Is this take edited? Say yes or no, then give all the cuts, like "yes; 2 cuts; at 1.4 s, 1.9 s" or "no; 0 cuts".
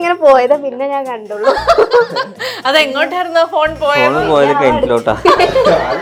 no; 0 cuts